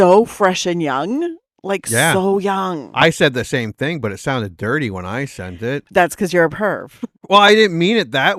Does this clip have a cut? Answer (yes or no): no